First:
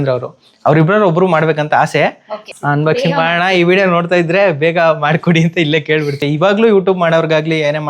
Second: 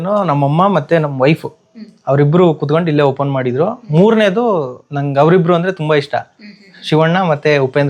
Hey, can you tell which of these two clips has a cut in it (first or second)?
first